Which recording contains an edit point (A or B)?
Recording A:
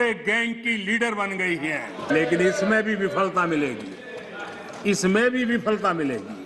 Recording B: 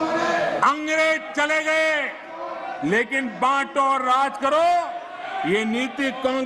A